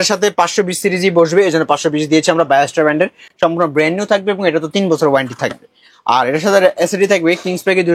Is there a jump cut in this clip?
no; 0 cuts

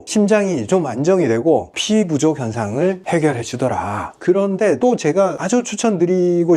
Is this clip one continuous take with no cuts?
no; 1 cut; at 4.1 s

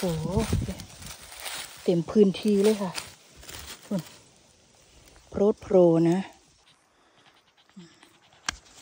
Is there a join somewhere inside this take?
yes; 1 cut; at 6.5 s

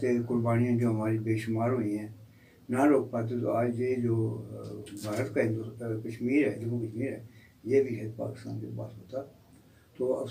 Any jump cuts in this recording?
no; 0 cuts

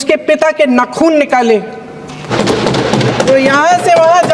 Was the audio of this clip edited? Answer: yes; 1 cut; at 2.3 s

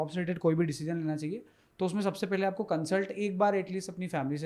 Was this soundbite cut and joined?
no; 0 cuts

